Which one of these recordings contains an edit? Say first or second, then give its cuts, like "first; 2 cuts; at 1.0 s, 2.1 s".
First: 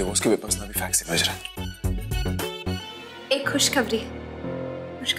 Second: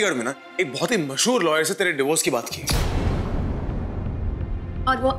first; 1 cut; at 3.1 s